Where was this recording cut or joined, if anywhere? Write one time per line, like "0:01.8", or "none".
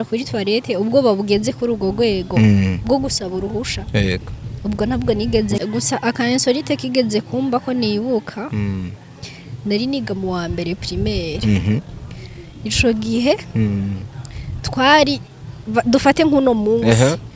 0:05.6